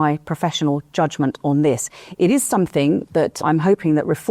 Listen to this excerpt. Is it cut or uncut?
cut